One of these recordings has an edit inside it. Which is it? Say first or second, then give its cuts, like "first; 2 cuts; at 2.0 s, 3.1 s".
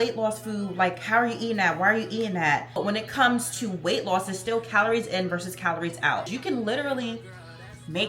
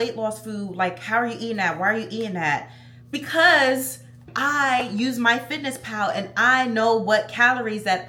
first; 2 cuts; at 2.8 s, 6.3 s